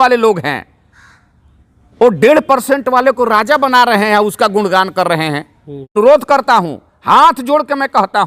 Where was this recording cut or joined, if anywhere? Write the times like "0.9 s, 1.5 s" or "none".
5.9 s